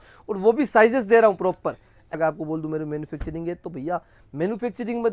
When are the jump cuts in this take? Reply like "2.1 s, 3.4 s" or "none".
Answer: 2.1 s